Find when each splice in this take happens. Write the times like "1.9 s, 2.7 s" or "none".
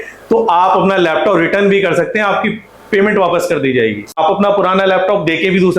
4.1 s

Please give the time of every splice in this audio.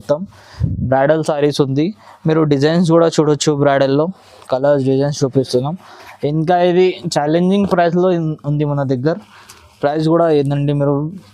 none

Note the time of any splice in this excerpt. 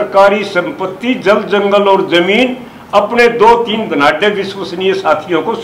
none

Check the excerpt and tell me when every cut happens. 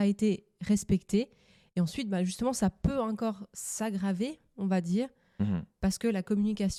none

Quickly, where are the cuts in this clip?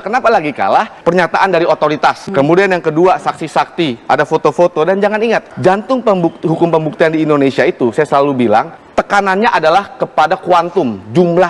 0.9 s, 2.2 s, 5.5 s, 8.8 s

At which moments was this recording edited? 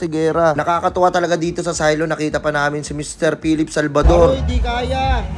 none

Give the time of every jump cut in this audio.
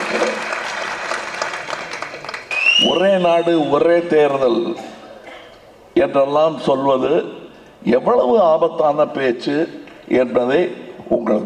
2.6 s

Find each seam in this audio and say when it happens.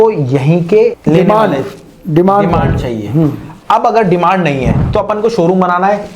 1.0 s

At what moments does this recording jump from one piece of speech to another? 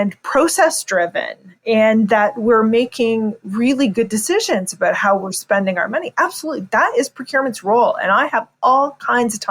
none

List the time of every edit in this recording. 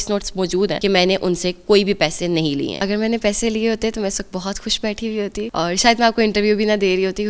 0.8 s, 2.8 s, 5.5 s

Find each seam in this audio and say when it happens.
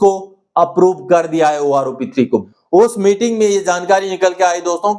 2.5 s

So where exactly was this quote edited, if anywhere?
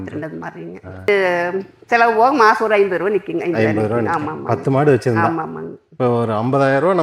1.1 s

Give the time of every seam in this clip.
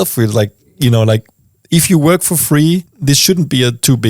2.9 s

